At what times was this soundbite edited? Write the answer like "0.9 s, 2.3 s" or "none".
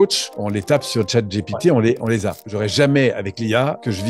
2.4 s

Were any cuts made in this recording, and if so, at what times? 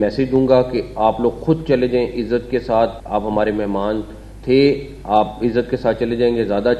3.0 s

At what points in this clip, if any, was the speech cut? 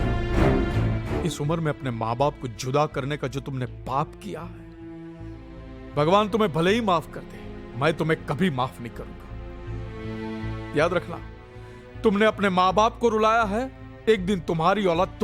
none

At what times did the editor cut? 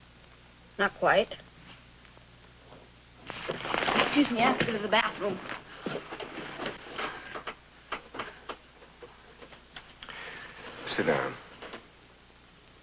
11.9 s

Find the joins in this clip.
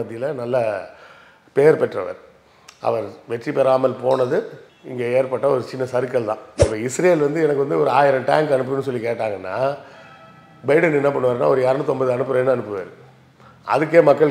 6.5 s

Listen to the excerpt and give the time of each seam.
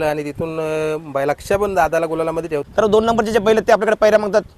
2.6 s

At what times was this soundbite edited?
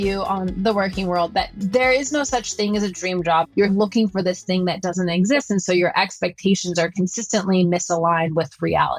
3.6 s

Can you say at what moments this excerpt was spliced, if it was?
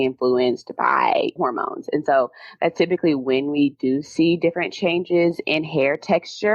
1.3 s

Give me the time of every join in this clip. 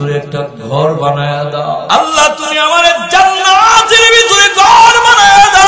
1.8 s

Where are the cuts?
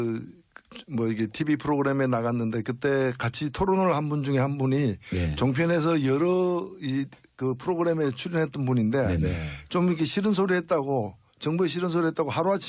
3.5 s

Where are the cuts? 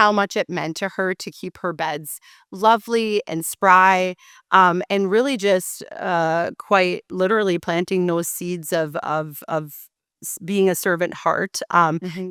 none

